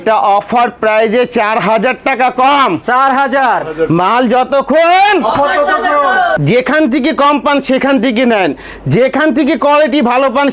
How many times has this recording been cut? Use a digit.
1